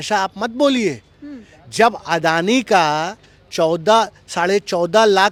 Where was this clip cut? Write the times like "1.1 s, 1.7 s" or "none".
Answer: none

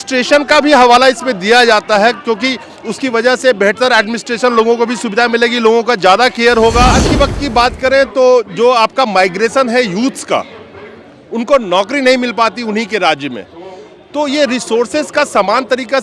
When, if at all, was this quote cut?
7.1 s

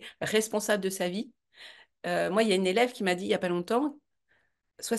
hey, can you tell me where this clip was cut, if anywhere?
none

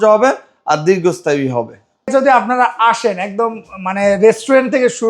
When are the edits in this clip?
2.1 s

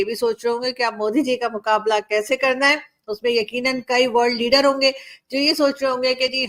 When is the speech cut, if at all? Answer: none

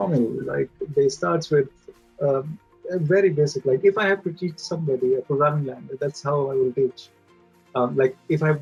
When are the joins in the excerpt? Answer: none

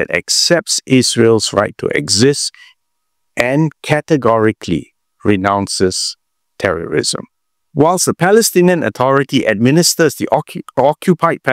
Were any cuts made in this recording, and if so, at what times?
7.6 s

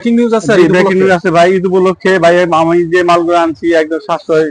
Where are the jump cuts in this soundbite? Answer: none

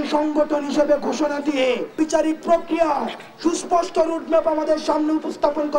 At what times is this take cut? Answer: 1.9 s

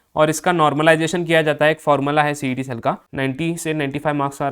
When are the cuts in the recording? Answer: 3.1 s

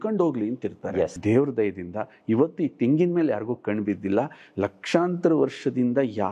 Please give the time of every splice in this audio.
1.2 s

